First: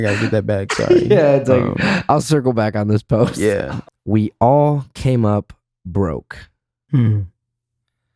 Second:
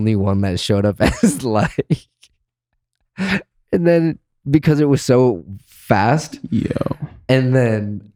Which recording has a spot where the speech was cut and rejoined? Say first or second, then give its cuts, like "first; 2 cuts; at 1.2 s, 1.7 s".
first; 1 cut; at 3.7 s